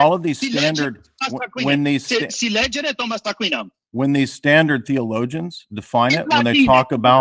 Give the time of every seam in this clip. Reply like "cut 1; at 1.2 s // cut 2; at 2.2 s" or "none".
none